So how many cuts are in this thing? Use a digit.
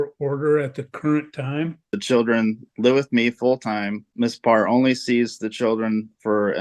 2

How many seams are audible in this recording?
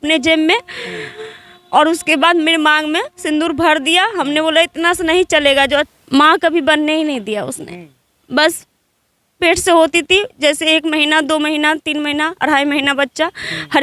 1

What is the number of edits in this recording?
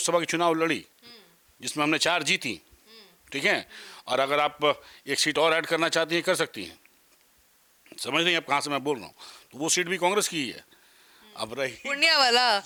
0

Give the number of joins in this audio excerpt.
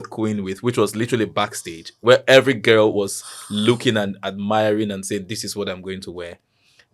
0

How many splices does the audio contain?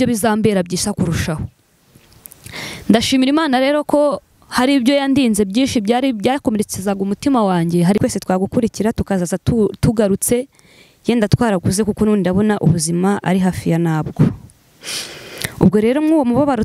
1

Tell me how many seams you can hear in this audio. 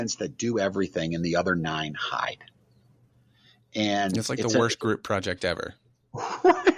0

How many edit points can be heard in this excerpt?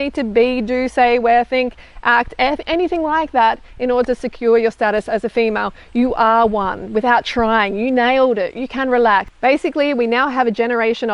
1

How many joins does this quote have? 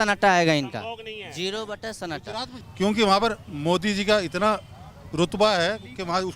1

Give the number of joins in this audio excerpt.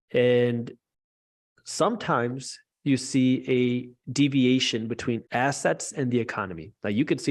1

